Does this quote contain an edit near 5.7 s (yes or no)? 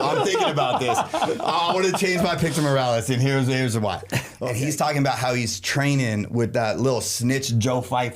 no